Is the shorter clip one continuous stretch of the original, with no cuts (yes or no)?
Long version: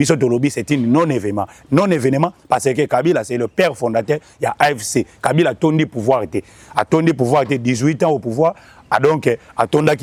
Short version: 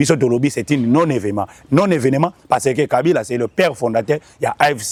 yes